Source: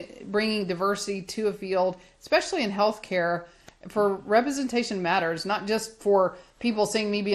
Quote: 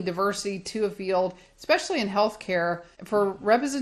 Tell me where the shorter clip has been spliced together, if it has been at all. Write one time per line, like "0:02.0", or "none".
0:02.9